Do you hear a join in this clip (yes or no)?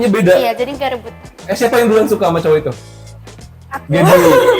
yes